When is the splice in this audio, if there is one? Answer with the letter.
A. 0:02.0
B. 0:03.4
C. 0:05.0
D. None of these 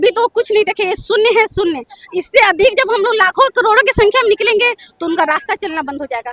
D